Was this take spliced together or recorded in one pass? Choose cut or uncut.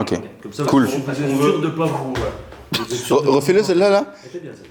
uncut